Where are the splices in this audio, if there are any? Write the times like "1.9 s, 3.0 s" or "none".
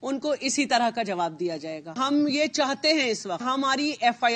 2.0 s, 3.4 s